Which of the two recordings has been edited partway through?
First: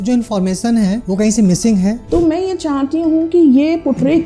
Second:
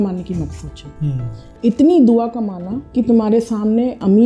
first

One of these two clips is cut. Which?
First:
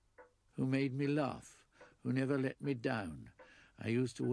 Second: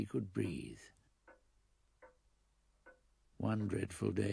first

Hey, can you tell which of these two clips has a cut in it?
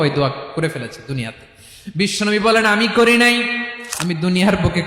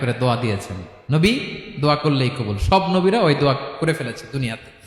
first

